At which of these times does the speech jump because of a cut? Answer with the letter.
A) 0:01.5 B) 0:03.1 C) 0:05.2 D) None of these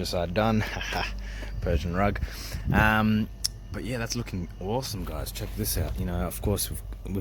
D